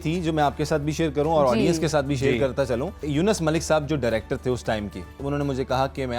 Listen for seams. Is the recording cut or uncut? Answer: cut